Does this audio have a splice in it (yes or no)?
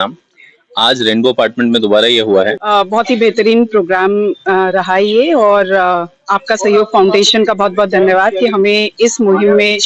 yes